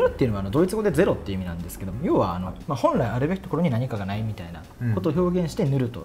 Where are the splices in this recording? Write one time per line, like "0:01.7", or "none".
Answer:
none